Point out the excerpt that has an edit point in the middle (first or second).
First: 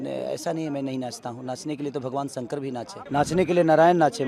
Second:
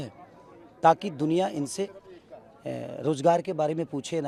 first